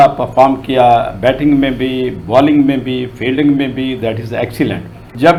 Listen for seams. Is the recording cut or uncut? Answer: uncut